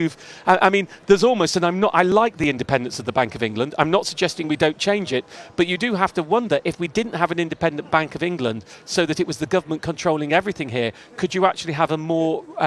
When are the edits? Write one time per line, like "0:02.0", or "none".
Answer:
none